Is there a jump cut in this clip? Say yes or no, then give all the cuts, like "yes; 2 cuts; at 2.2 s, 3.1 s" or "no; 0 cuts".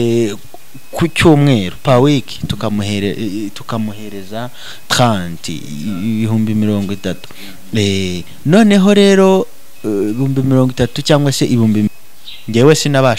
yes; 1 cut; at 11.9 s